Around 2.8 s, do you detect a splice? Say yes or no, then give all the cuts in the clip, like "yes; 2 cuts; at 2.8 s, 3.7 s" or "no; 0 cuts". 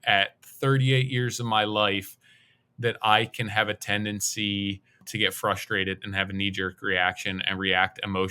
no; 1 cut; at 5.1 s